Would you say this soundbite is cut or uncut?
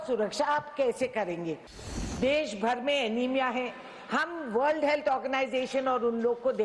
cut